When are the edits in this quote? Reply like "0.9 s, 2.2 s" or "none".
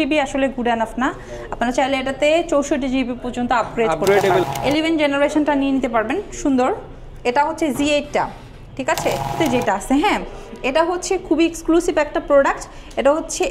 4.5 s, 9.3 s